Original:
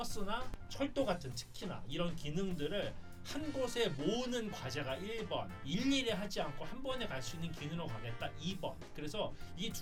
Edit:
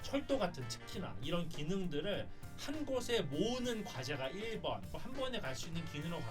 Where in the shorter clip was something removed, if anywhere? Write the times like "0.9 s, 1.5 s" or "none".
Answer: 4.9 s